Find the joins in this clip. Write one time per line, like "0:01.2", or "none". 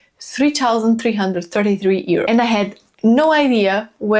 0:02.3

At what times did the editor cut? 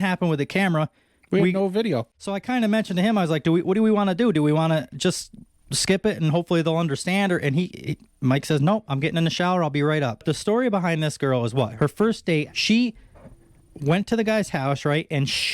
0:02.1
0:10.2
0:11.7
0:12.5

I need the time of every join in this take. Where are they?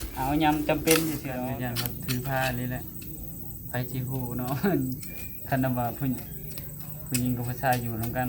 0:01.4

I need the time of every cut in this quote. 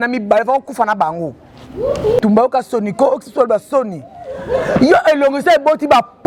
0:02.2

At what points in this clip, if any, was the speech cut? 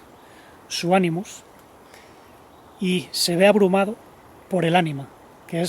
none

